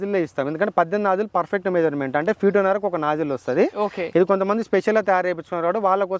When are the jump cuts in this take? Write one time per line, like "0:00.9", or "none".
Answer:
none